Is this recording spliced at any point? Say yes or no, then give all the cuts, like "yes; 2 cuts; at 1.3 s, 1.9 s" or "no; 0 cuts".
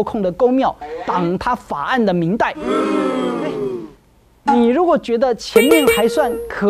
no; 0 cuts